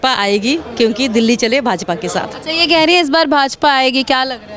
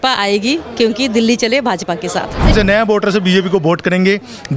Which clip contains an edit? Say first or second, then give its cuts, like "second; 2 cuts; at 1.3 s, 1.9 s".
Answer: second; 1 cut; at 2.5 s